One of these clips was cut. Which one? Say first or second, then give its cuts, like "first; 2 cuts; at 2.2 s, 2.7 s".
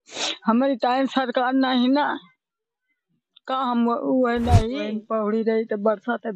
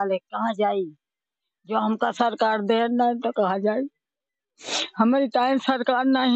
first; 1 cut; at 4.8 s